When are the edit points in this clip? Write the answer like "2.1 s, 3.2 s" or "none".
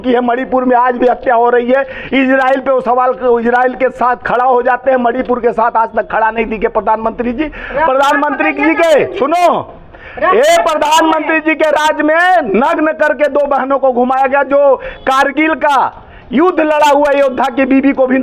none